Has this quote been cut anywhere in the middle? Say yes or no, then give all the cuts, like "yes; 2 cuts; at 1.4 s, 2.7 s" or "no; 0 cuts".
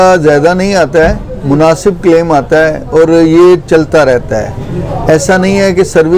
no; 0 cuts